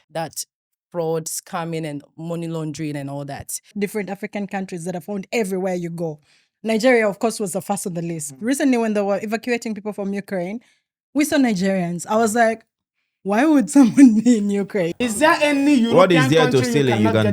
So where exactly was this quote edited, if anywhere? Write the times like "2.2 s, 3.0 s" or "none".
3.7 s, 14.9 s